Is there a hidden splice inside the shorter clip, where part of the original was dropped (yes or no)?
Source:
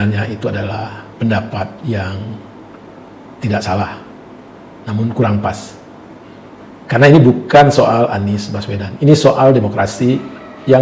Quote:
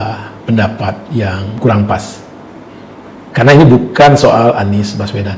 yes